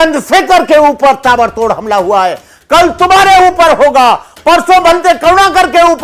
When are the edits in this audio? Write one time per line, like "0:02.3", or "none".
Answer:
none